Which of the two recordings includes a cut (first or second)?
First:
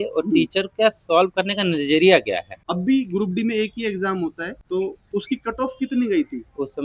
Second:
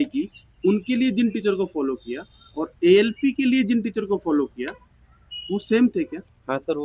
first